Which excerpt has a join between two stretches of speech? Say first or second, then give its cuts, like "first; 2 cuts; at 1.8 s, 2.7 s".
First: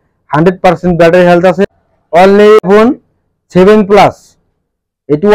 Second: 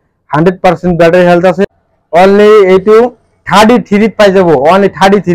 first; 1 cut; at 2.6 s